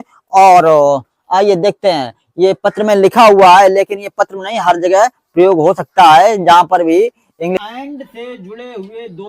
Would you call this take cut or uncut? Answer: cut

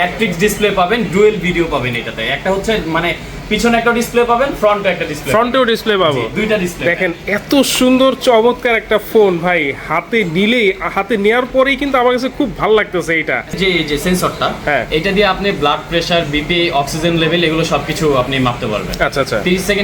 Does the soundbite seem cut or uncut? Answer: cut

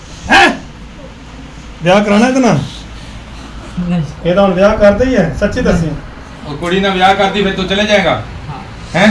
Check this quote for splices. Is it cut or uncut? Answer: uncut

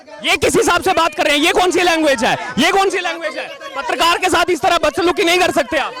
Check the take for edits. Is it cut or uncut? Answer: uncut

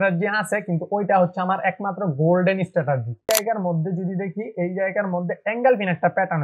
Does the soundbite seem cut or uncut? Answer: cut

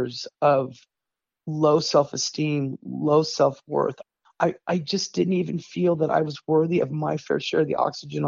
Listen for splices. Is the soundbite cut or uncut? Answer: uncut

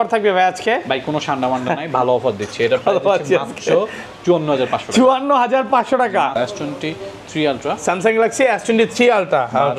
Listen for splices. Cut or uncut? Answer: cut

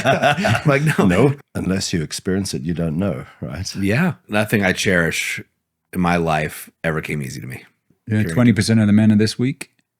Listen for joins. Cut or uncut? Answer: cut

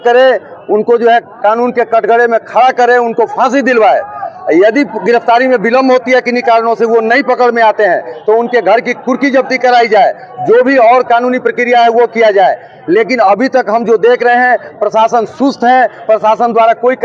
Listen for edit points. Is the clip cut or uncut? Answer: uncut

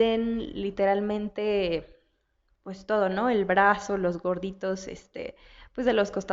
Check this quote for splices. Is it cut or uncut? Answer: uncut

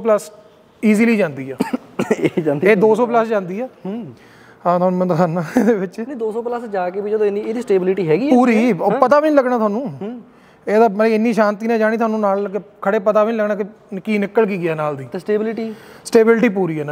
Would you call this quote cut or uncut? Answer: uncut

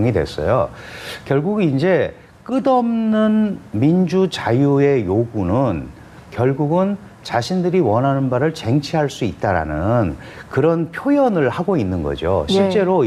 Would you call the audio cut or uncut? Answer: uncut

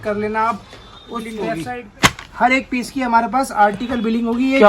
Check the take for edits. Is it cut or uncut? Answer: cut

